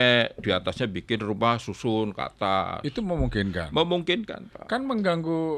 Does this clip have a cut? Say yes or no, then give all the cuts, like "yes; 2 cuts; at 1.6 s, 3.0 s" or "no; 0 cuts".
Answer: no; 0 cuts